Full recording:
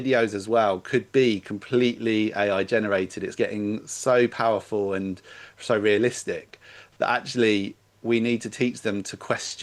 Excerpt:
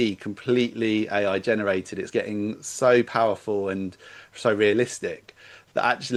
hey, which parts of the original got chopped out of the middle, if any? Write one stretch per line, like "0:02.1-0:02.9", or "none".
none